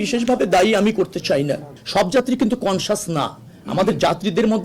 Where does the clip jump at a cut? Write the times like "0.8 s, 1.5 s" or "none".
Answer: 1.7 s